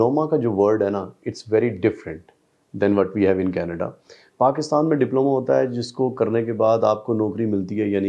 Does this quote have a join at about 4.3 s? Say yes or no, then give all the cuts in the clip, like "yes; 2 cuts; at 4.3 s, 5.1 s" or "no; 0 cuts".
no; 0 cuts